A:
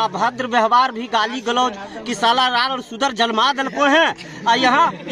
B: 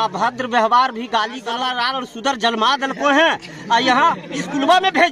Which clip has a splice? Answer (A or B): B